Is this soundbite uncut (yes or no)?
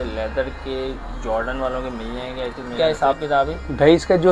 no